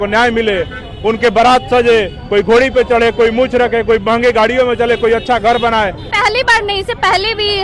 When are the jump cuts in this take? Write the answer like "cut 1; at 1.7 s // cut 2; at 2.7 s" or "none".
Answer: cut 1; at 6.0 s